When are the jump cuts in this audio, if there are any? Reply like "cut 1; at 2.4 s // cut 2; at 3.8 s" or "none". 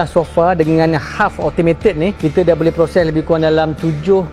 none